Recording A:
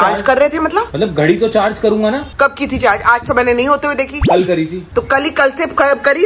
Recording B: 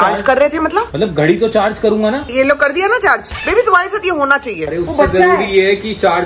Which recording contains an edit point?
B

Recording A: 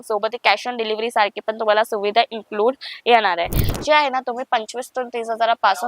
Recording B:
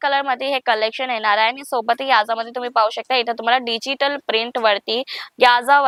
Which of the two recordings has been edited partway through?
A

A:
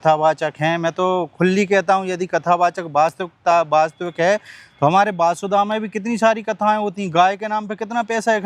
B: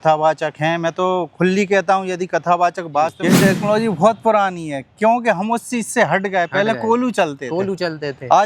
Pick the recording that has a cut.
B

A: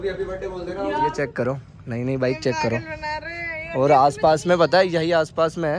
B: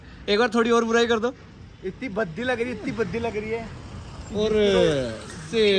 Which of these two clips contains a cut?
A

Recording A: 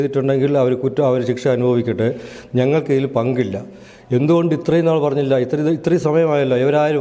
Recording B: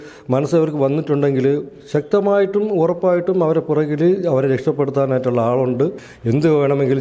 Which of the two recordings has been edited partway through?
B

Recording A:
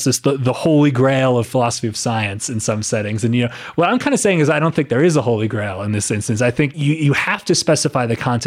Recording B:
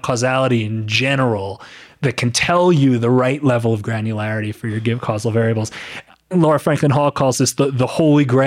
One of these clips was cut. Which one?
A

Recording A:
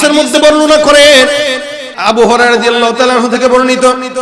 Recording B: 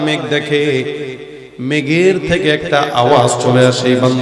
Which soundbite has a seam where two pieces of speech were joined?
A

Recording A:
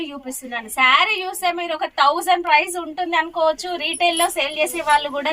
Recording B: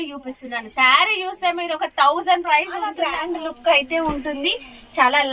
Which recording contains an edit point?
B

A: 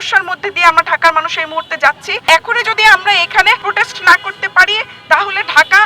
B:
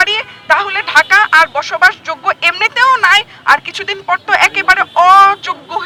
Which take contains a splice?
A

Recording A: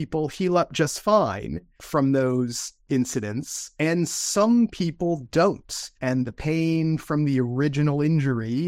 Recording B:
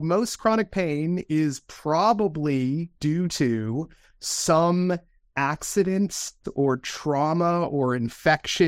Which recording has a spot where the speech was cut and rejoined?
A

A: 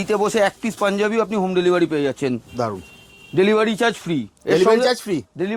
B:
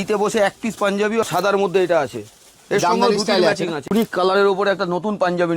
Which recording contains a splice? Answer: B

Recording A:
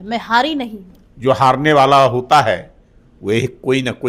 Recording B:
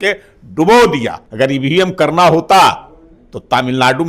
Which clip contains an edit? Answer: B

